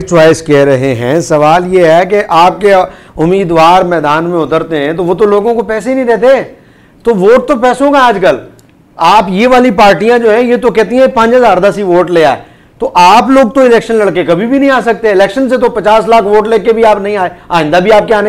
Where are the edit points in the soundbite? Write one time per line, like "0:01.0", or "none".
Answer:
none